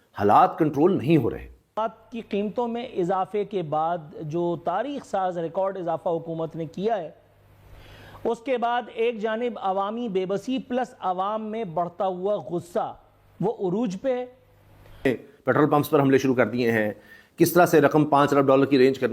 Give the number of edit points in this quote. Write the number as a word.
two